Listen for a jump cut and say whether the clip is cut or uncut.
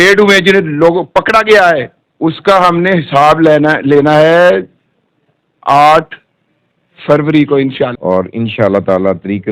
cut